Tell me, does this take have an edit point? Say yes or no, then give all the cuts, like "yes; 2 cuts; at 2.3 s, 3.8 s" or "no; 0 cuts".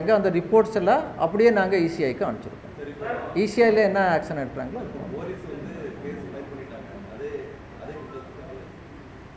no; 0 cuts